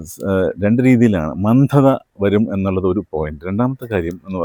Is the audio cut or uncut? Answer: uncut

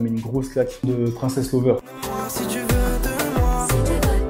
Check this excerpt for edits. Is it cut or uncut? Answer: cut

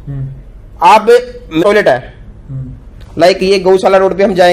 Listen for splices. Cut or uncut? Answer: cut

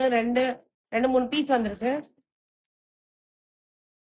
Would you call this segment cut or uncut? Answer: uncut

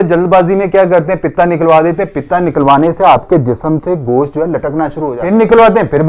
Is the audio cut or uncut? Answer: cut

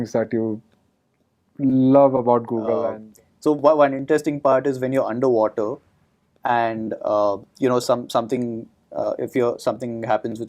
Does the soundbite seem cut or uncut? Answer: cut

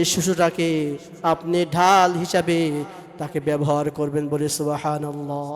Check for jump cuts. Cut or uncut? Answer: uncut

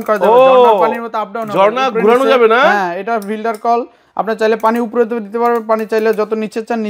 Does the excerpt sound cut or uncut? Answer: uncut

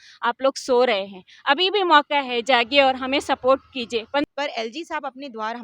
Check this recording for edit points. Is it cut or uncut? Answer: cut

